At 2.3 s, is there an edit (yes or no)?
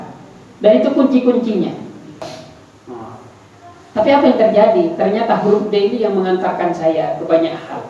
yes